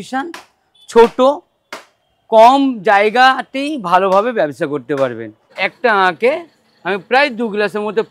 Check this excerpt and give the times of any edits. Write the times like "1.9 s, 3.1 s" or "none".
5.4 s